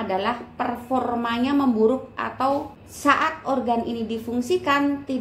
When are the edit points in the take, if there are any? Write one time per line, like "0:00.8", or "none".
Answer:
0:02.8